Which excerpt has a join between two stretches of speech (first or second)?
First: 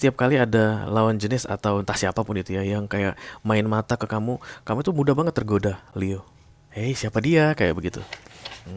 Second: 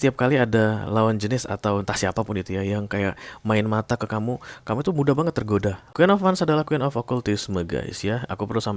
second